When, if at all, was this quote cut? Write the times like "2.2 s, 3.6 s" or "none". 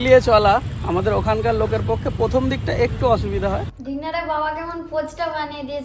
3.7 s